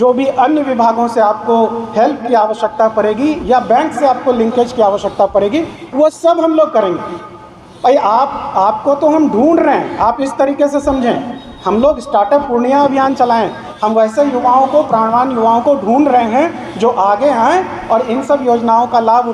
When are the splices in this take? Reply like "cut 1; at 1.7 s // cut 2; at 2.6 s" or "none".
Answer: none

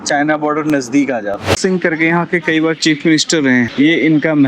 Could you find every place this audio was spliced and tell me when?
cut 1; at 1.6 s // cut 2; at 3.7 s

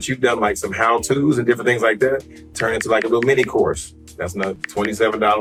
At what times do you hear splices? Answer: none

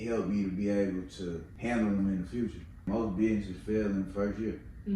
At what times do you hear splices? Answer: cut 1; at 1.5 s // cut 2; at 2.9 s

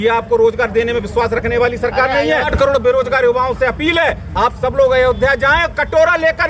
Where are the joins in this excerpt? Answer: cut 1; at 2.5 s

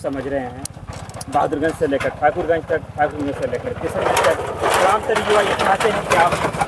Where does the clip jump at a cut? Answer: none

